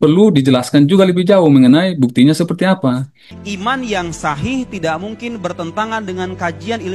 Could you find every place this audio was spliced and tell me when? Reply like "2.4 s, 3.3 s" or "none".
3.2 s